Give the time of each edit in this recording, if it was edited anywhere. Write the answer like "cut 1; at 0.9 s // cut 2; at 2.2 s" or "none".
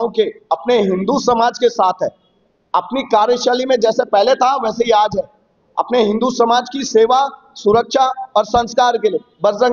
none

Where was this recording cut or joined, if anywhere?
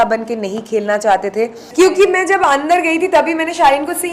cut 1; at 1.6 s

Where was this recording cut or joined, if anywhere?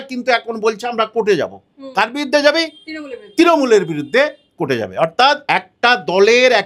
cut 1; at 5.4 s

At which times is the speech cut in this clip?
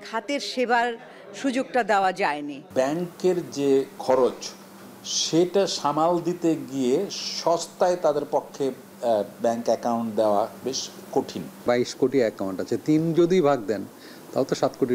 cut 1; at 2.6 s // cut 2; at 3.9 s // cut 3; at 11.6 s

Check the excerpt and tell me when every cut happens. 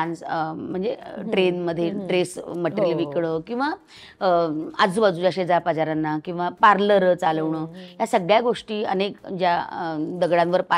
none

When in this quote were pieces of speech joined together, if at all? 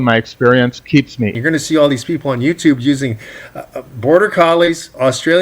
cut 1; at 1.3 s

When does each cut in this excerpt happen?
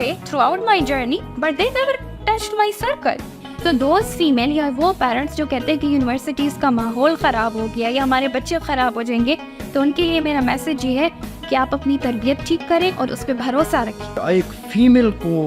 cut 1; at 3.3 s // cut 2; at 14.2 s

